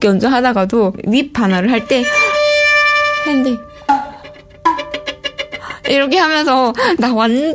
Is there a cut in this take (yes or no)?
yes